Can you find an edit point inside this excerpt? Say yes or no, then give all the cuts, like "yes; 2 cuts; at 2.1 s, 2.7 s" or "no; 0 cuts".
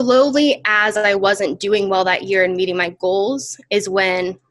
no; 0 cuts